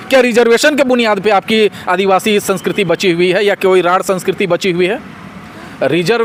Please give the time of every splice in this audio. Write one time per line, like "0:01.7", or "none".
none